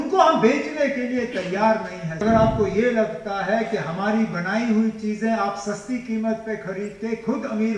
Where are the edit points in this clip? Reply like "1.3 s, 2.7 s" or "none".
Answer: 2.2 s